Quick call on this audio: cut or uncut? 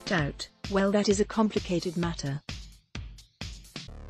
uncut